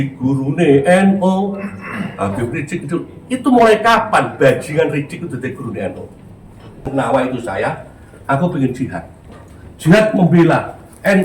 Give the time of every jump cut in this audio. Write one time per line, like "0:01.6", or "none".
0:06.9